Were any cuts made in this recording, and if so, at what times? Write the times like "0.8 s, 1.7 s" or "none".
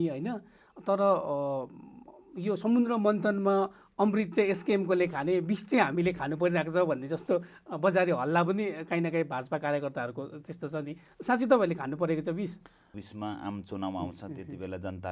13.0 s